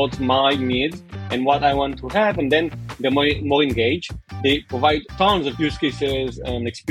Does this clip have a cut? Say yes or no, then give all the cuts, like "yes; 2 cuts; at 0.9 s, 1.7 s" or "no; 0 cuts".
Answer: no; 0 cuts